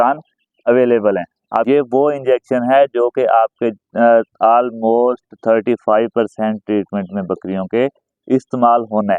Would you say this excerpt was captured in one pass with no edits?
no; 1 cut; at 1.7 s

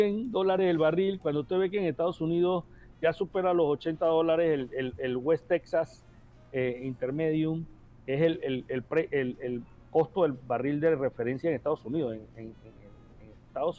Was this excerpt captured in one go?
yes; 0 cuts

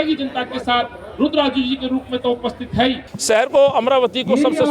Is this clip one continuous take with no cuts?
no; 1 cut; at 3.1 s

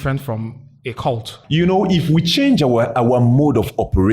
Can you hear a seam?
yes; 1 cut; at 1.4 s

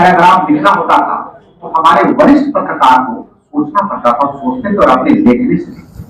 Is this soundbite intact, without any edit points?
yes; 0 cuts

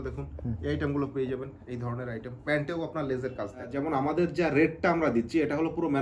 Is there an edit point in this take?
yes; 1 cut; at 3.7 s

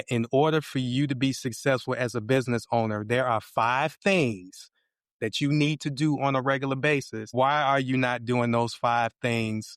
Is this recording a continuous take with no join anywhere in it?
no; 1 cut; at 7.2 s

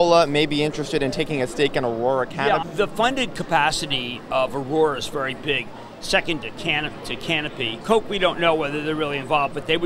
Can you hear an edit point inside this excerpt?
no; 0 cuts

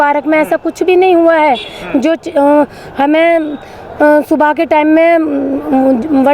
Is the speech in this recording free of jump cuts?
yes; 0 cuts

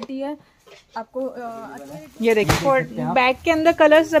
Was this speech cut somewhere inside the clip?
yes; 1 cut; at 1.8 s

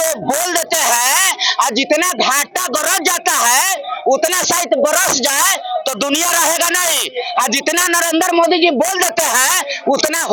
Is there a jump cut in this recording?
no; 0 cuts

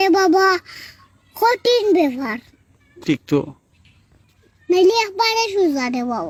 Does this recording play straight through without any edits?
yes; 0 cuts

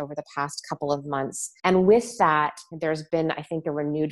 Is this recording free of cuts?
no; 2 cuts; at 1.4 s, 2.7 s

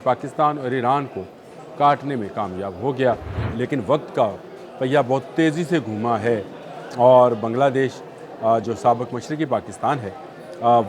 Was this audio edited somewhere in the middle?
yes; 1 cut; at 3.4 s

